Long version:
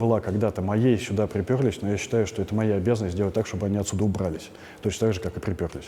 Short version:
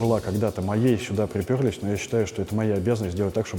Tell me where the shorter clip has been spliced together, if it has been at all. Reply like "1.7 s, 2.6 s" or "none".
none